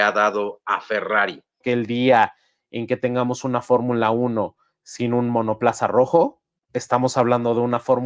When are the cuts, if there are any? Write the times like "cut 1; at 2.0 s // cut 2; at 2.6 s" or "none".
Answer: cut 1; at 1.6 s